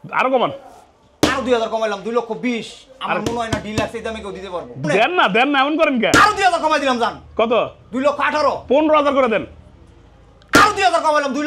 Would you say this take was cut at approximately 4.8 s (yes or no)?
yes